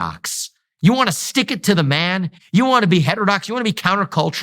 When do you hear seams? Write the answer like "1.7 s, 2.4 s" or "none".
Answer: 2.4 s